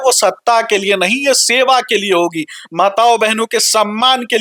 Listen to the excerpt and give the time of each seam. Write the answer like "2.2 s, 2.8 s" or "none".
none